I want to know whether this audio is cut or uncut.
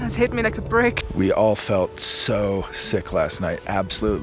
uncut